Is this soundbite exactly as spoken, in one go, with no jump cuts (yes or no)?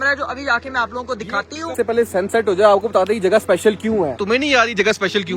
no